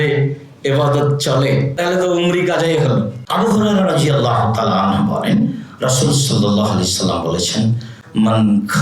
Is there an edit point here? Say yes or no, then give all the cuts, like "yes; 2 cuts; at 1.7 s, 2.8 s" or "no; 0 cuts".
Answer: yes; 2 cuts; at 1.7 s, 3.2 s